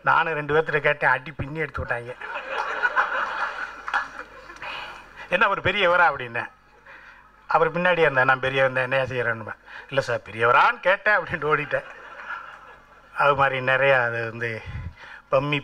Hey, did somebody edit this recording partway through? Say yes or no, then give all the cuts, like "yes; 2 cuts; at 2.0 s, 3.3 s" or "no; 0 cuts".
no; 0 cuts